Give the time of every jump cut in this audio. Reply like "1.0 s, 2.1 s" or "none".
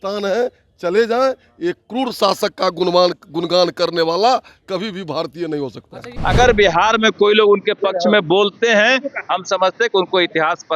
6.1 s